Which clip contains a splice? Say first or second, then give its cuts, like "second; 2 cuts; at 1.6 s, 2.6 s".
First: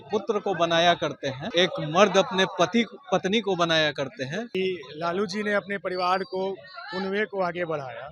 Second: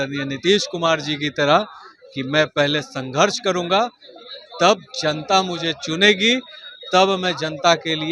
first; 2 cuts; at 1.4 s, 4.5 s